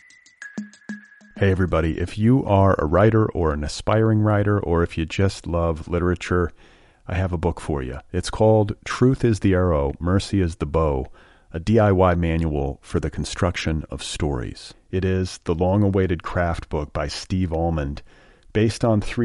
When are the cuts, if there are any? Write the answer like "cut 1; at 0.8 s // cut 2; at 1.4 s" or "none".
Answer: cut 1; at 0.9 s